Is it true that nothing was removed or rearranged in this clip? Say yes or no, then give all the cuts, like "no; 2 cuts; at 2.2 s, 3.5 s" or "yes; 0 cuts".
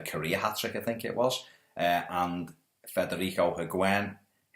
no; 1 cut; at 2.5 s